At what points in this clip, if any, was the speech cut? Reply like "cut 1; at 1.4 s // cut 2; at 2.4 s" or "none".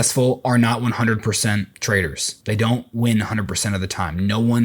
cut 1; at 2.0 s

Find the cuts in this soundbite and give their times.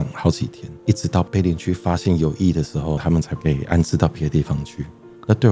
cut 1; at 0.9 s // cut 2; at 2.9 s

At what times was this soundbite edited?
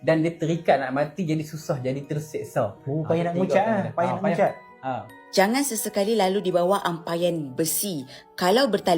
cut 1; at 5.2 s

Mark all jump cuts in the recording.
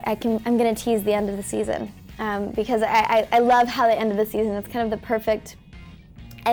none

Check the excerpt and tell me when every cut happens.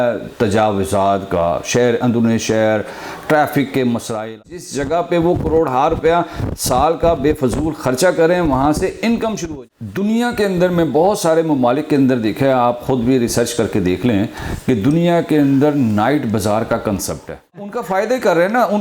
cut 1; at 4.4 s // cut 2; at 9.4 s // cut 3; at 17.8 s

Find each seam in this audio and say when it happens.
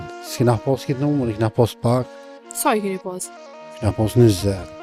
none

